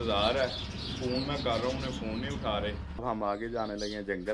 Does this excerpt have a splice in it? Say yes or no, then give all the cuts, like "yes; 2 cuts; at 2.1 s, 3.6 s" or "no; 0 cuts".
yes; 1 cut; at 2.9 s